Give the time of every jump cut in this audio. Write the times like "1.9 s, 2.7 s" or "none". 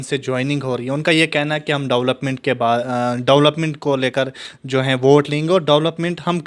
none